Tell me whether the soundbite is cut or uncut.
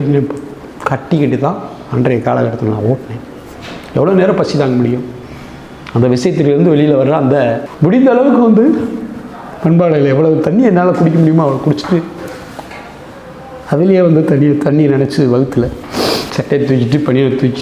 cut